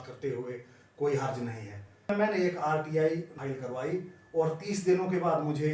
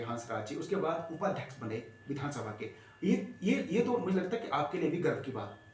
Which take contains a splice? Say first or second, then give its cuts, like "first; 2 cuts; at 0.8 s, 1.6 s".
first; 2 cuts; at 2.1 s, 3.3 s